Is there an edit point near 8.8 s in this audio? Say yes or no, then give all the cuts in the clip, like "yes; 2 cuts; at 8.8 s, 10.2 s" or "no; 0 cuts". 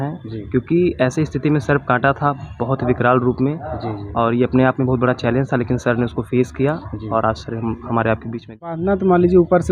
yes; 1 cut; at 8.8 s